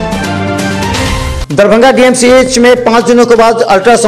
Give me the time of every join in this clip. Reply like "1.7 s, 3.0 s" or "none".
1.4 s